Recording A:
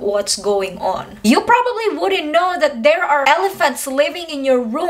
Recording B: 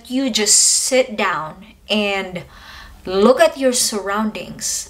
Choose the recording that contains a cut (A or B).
A